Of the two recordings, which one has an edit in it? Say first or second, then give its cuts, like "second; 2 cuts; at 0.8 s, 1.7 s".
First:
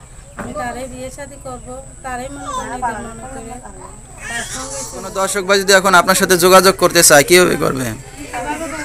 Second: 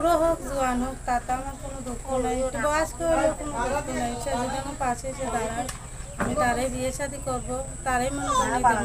first; 1 cut; at 5.2 s